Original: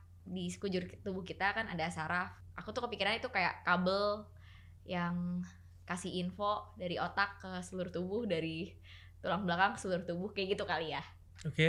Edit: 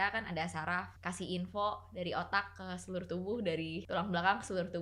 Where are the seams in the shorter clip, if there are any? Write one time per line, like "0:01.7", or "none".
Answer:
0:00.9
0:03.8